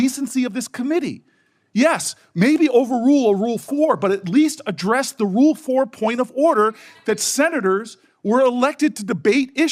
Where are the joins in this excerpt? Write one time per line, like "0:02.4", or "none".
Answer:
none